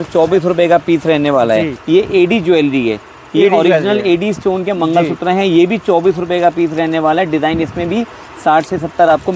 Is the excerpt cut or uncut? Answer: cut